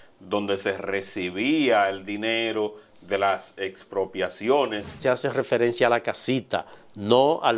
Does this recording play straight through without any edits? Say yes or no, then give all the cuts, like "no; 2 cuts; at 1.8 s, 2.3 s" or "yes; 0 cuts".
no; 1 cut; at 5.0 s